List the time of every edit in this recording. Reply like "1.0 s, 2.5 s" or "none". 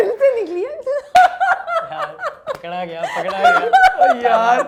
none